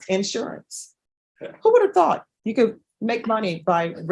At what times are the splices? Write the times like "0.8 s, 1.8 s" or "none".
none